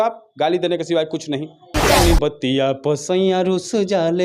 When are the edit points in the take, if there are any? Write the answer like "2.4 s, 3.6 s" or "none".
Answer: 1.9 s